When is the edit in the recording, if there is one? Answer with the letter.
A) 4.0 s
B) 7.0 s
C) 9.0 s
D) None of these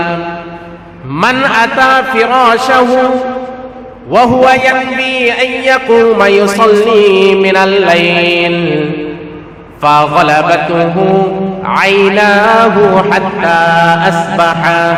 D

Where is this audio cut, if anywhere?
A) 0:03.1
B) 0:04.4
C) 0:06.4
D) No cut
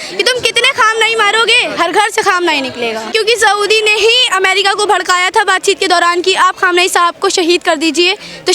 A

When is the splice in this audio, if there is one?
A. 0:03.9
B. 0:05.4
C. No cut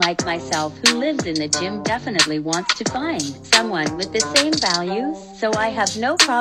A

